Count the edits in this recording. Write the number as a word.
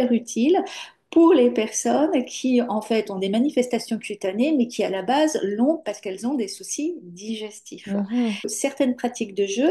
one